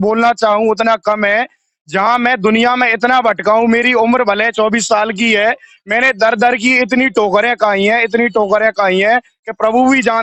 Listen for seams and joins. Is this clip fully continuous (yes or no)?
yes